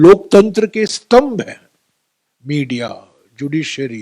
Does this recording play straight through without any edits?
yes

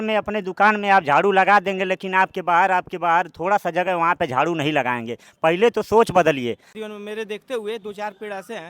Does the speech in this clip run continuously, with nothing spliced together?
no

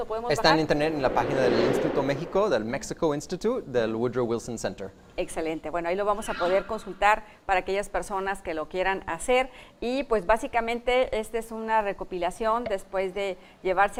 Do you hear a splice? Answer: no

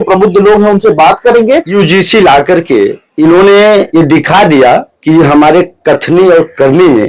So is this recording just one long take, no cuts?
no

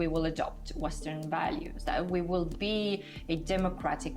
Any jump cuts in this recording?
no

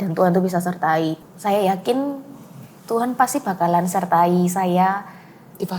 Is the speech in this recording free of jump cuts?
no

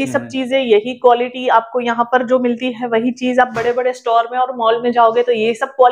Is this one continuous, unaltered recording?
yes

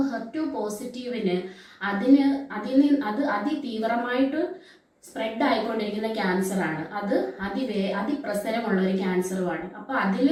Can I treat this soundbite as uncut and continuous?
yes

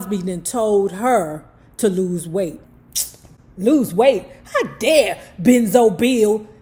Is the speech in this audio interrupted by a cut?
no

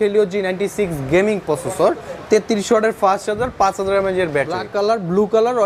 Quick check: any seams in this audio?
yes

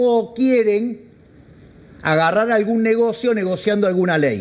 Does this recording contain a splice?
no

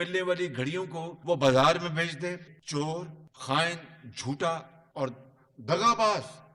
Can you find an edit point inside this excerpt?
yes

